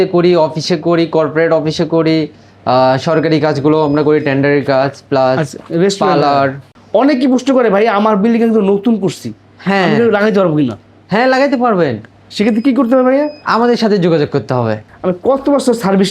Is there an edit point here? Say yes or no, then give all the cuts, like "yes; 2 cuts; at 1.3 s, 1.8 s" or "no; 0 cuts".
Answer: yes; 3 cuts; at 5.6 s, 6.7 s, 14.8 s